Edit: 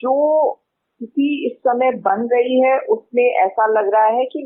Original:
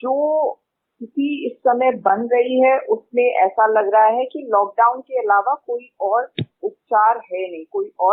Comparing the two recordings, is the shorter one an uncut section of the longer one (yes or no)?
yes